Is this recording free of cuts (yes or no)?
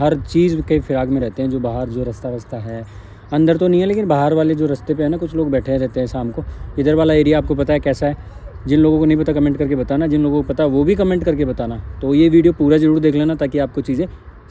yes